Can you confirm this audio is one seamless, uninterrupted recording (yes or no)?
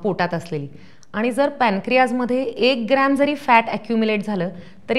yes